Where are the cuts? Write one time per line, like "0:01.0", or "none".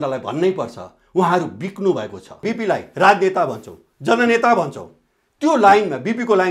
0:02.5